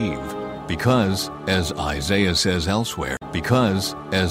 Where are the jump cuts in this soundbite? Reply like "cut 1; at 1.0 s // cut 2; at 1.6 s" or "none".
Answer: none

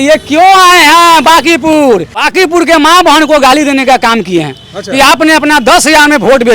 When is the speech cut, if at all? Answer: cut 1; at 2.2 s

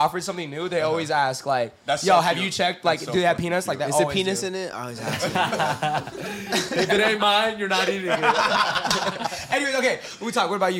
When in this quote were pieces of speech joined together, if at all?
none

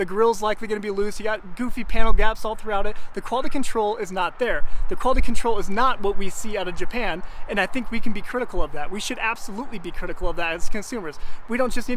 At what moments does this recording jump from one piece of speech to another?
none

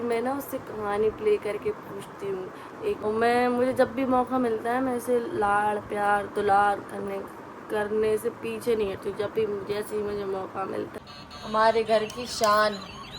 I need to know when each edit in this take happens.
cut 1; at 3.0 s // cut 2; at 10.9 s

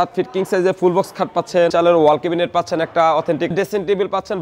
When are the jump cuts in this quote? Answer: cut 1; at 1.7 s // cut 2; at 3.5 s

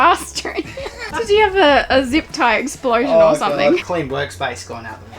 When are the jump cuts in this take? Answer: cut 1; at 1.1 s // cut 2; at 3.8 s

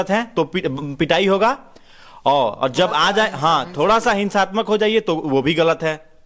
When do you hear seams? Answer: none

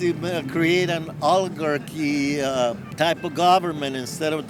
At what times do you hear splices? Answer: none

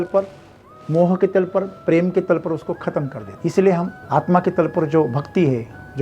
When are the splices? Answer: cut 1; at 3.2 s // cut 2; at 4.0 s

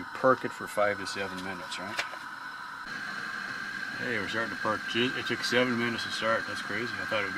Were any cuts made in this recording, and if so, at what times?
cut 1; at 2.9 s

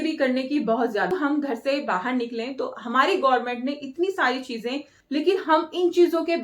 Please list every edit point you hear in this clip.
cut 1; at 1.1 s // cut 2; at 4.9 s

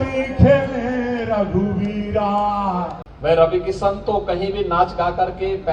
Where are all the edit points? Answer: cut 1; at 3.0 s

